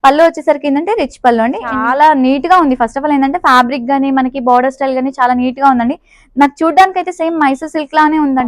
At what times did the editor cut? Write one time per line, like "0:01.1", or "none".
0:01.8